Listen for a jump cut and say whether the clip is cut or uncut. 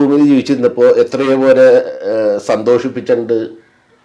uncut